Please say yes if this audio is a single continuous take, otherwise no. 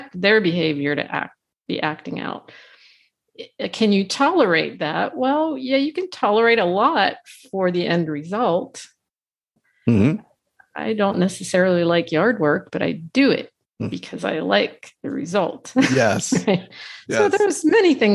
yes